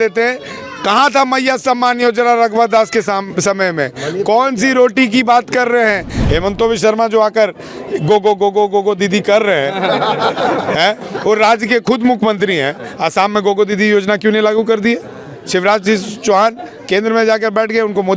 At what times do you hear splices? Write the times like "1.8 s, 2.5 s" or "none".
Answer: 6.1 s